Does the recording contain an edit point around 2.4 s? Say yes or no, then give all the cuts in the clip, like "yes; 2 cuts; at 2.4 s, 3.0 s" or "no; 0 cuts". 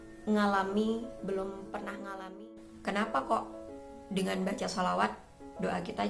yes; 1 cut; at 2.4 s